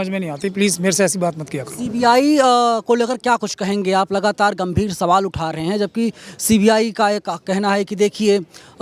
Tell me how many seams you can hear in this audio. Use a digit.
0